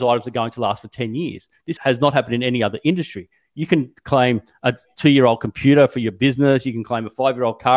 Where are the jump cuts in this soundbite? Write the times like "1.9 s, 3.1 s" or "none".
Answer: 1.8 s